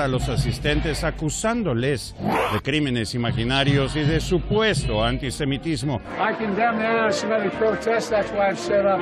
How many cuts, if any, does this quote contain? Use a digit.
1